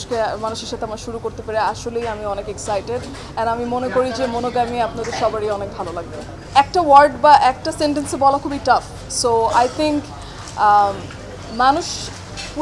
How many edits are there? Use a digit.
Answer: 0